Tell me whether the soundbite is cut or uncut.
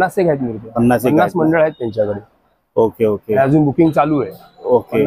uncut